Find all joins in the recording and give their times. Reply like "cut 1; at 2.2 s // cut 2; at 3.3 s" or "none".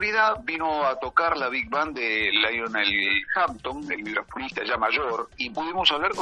cut 1; at 5.3 s